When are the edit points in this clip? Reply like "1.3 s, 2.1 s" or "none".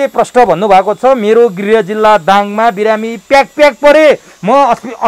none